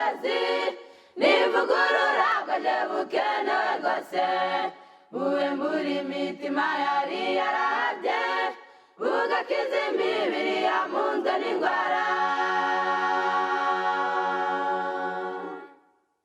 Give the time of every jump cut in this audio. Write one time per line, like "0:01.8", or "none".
0:02.3
0:04.5